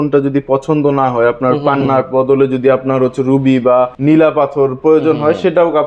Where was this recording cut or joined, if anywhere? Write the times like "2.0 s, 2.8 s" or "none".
3.9 s